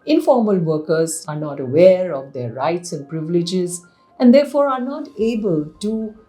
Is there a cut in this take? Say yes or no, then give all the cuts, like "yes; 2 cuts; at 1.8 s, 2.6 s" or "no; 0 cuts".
yes; 1 cut; at 1.2 s